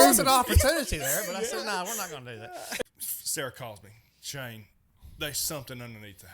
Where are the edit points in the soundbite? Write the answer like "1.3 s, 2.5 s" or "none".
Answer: 2.8 s